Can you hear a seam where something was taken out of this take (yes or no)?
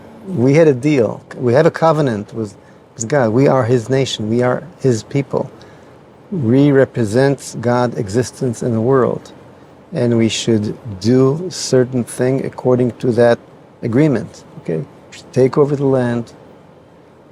yes